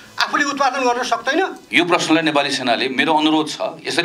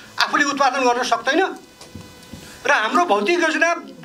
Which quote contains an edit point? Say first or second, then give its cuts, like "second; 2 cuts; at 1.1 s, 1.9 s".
first; 1 cut; at 1.6 s